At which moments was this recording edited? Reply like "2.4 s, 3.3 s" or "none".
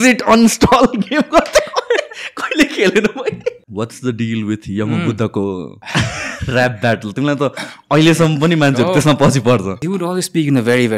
3.6 s, 5.8 s, 9.7 s